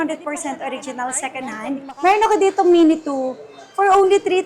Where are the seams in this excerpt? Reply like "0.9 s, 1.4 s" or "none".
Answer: 1.8 s